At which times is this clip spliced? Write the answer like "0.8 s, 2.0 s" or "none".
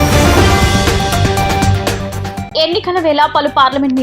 2.3 s